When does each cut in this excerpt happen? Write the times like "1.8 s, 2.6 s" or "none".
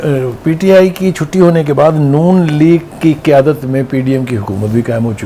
none